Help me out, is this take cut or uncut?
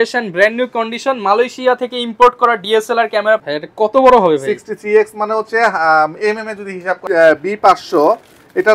cut